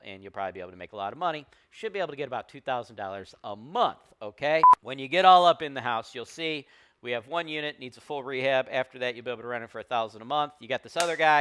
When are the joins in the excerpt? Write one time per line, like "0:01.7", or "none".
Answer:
0:04.8